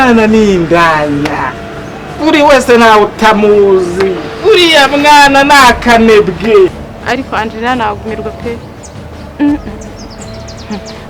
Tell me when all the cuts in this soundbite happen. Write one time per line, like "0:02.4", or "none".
0:06.9